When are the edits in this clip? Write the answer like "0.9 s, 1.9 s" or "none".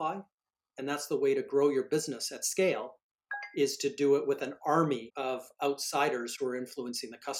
5.1 s